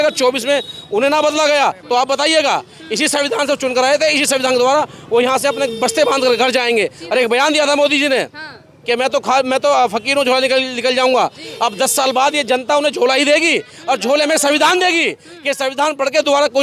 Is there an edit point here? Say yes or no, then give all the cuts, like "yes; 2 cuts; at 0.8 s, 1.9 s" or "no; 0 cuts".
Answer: no; 0 cuts